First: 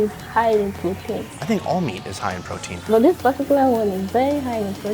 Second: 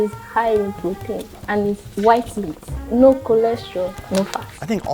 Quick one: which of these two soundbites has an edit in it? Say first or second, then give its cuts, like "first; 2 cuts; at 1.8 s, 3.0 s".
first; 2 cuts; at 1.3 s, 2.8 s